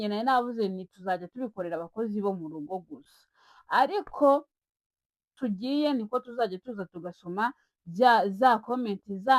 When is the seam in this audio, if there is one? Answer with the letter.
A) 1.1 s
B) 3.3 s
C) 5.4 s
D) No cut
C